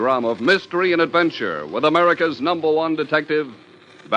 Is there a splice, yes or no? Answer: yes